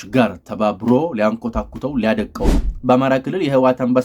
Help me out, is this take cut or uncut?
cut